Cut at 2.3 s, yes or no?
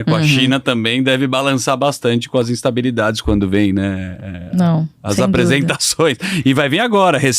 no